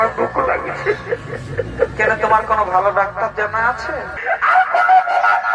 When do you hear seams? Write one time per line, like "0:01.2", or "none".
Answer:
0:04.2